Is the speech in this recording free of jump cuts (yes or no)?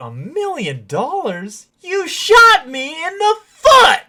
yes